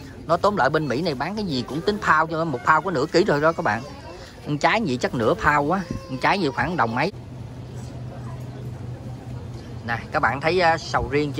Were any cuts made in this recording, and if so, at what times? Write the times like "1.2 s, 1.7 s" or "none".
7.1 s